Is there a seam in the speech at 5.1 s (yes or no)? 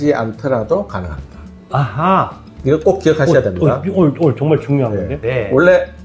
yes